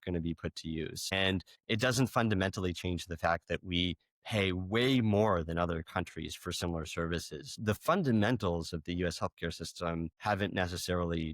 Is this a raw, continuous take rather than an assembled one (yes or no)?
no